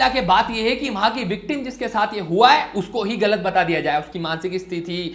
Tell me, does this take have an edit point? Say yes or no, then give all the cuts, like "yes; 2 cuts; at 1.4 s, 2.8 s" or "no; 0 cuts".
no; 0 cuts